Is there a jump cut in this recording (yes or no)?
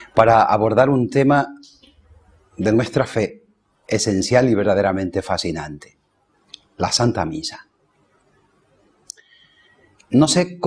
no